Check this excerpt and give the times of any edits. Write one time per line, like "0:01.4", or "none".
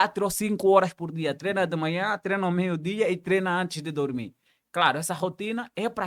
none